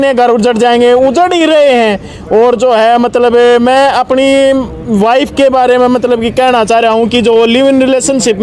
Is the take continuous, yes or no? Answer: yes